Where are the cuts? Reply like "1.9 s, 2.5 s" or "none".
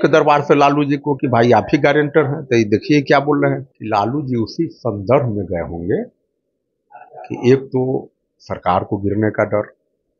3.7 s